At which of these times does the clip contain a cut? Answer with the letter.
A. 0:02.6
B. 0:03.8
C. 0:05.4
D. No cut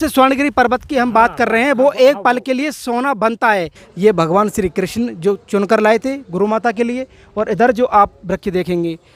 B